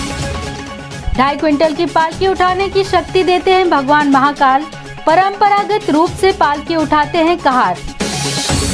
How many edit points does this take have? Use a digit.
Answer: 1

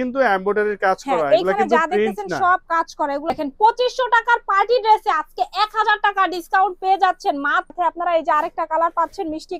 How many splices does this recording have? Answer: 2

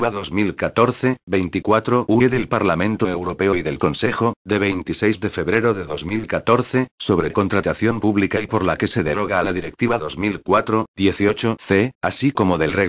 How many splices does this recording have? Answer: 1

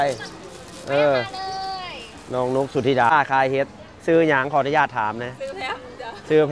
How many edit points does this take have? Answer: 1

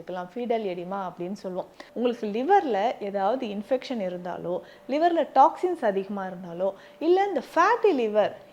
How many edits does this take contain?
1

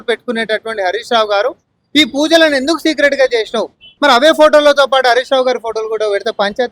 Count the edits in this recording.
1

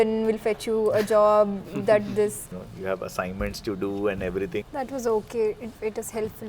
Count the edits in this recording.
3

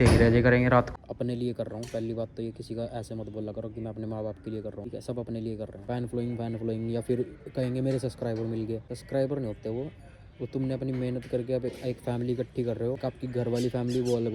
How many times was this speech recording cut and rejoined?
5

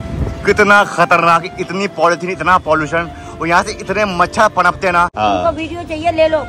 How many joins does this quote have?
1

